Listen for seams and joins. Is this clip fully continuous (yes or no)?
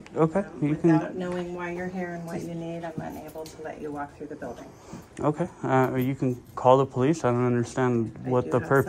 yes